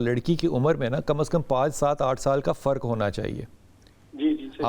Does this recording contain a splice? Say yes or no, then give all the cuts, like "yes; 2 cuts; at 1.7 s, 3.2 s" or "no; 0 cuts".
no; 0 cuts